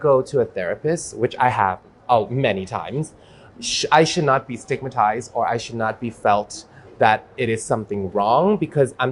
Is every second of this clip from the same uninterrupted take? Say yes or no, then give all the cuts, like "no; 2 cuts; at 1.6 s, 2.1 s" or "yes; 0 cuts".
yes; 0 cuts